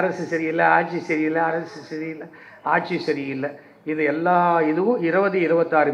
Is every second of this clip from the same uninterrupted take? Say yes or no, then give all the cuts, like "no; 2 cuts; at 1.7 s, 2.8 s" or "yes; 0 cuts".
yes; 0 cuts